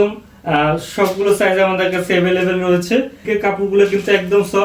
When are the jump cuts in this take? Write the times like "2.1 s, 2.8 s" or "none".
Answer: 3.2 s